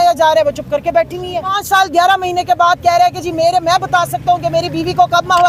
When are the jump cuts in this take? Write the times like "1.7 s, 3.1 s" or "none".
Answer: 1.6 s